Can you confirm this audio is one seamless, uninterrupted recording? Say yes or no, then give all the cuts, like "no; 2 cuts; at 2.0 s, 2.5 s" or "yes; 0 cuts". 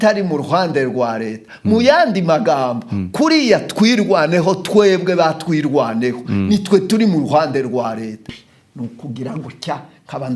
no; 1 cut; at 8.2 s